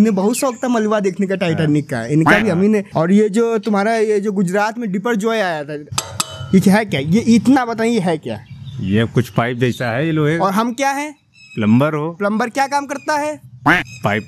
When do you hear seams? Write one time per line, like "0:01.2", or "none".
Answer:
0:02.9
0:05.8